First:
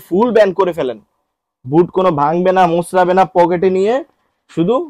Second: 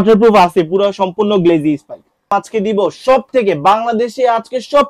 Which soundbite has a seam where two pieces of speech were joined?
second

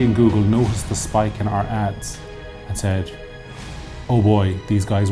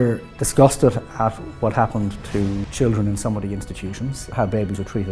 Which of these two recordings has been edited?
second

